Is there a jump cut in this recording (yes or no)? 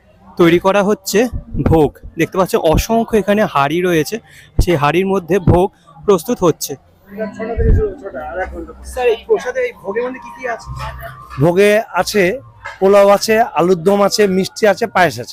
no